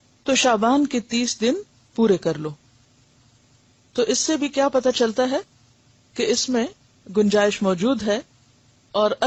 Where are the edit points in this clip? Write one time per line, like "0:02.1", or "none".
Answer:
none